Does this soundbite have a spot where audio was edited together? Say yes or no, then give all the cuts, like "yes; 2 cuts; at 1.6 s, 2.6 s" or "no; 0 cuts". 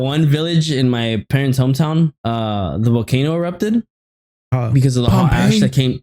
yes; 1 cut; at 2.2 s